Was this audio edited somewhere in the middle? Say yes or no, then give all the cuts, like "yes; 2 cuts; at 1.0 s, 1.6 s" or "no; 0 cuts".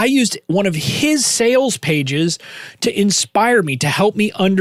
no; 0 cuts